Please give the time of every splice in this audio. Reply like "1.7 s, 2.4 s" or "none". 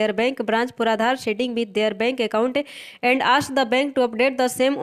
none